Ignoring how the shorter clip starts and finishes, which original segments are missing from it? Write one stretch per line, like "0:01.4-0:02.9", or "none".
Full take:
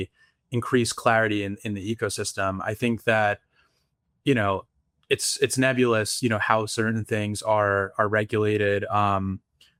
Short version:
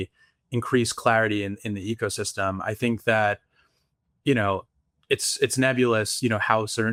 none